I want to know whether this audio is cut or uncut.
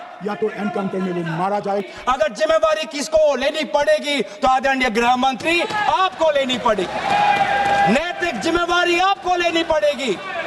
cut